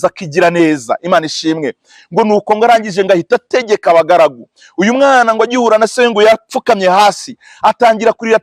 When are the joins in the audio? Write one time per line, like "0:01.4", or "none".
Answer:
none

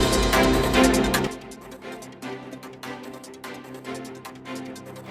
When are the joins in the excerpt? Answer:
0:00.9

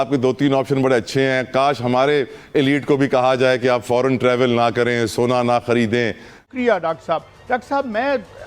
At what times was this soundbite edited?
0:06.4

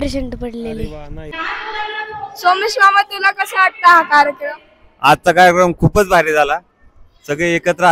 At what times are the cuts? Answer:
0:01.3

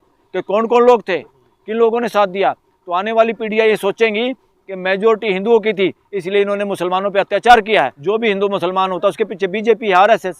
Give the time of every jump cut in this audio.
0:08.0

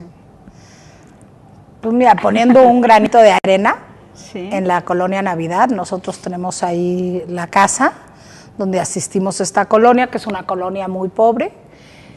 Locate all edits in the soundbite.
0:08.0

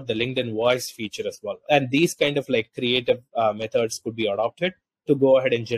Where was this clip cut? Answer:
0:01.6

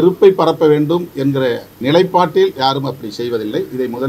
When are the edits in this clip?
0:01.7

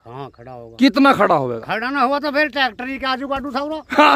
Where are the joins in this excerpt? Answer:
none

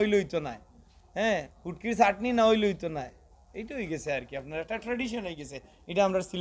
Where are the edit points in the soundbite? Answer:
none

